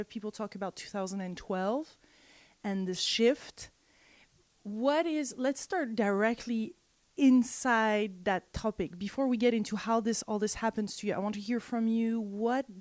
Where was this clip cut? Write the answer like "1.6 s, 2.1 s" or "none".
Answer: none